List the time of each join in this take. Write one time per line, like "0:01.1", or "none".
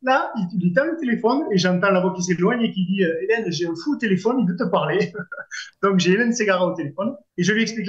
none